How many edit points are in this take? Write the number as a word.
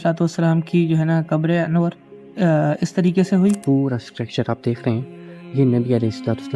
one